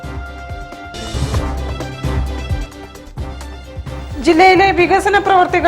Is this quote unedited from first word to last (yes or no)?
no